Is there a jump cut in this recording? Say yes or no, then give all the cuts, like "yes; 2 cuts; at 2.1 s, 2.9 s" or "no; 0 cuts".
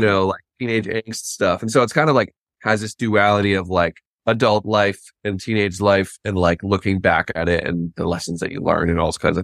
yes; 1 cut; at 4.1 s